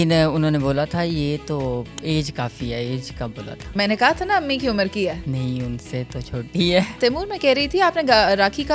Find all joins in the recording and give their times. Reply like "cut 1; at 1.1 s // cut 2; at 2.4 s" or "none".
cut 1; at 5.2 s // cut 2; at 6.9 s